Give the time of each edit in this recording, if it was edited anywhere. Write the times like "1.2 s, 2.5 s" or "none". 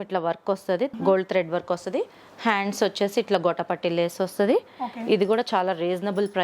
0.9 s